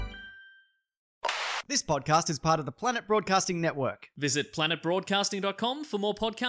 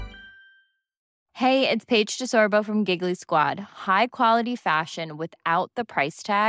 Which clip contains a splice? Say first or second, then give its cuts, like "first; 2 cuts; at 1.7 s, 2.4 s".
first; 1 cut; at 1.2 s